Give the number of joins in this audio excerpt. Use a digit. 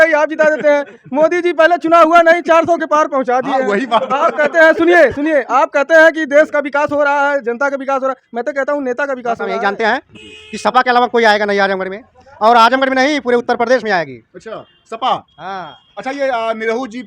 1